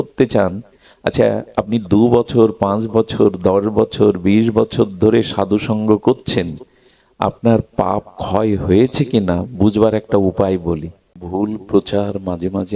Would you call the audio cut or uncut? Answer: cut